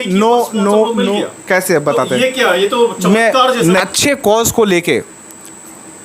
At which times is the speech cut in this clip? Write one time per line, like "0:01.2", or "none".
0:03.8